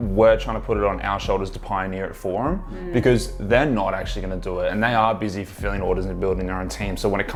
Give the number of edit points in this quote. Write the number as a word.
zero